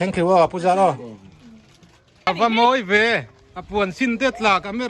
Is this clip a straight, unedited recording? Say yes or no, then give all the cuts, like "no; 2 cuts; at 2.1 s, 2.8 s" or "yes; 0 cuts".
no; 1 cut; at 2.3 s